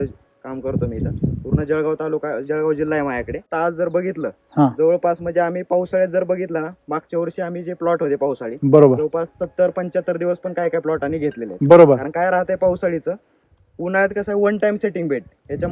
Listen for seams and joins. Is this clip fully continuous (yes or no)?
no